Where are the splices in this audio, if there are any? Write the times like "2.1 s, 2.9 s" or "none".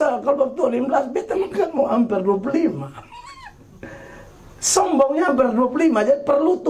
none